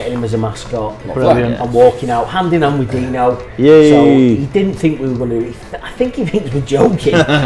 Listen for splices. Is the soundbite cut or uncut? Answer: uncut